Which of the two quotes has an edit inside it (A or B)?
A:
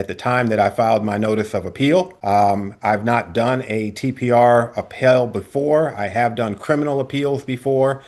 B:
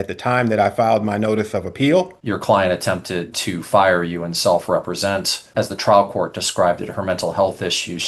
B